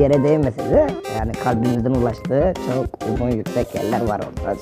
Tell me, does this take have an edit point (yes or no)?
no